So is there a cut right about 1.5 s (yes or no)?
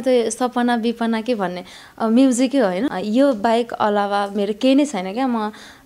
no